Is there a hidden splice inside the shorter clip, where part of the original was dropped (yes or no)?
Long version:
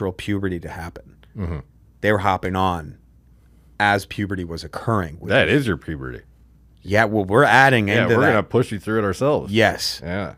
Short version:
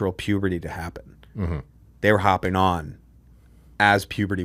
no